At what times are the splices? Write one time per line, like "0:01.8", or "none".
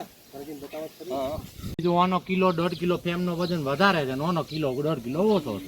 0:01.7